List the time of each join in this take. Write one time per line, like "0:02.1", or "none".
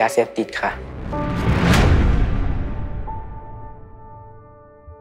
none